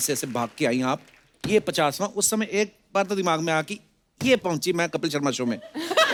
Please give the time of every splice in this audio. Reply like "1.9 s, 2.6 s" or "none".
none